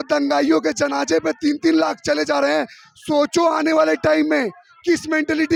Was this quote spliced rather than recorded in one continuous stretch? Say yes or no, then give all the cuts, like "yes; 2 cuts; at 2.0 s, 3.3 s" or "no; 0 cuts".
no; 0 cuts